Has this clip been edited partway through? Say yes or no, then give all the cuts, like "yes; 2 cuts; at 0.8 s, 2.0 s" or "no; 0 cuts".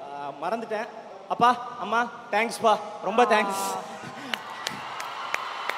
yes; 1 cut; at 1.1 s